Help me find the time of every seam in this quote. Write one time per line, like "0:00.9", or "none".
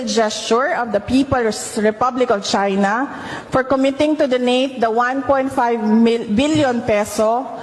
none